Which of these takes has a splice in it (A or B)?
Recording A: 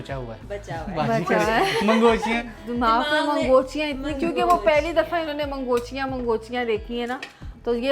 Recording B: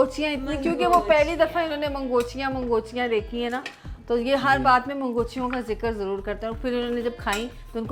A